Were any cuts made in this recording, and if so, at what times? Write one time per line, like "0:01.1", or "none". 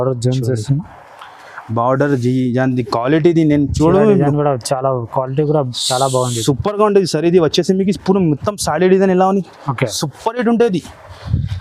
none